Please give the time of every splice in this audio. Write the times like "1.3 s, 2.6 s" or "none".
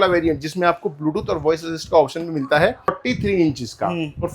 3.0 s